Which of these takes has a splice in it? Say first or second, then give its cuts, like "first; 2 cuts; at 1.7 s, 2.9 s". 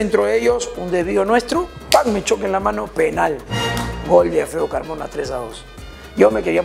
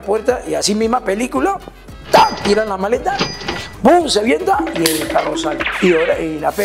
second; 1 cut; at 5.7 s